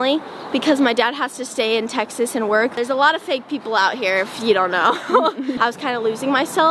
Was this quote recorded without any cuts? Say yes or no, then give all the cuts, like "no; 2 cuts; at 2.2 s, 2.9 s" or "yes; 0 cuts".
no; 2 cuts; at 2.7 s, 5.6 s